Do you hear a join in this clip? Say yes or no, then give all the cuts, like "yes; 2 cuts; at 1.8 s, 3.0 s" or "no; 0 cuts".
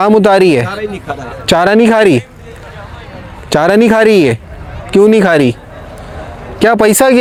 no; 0 cuts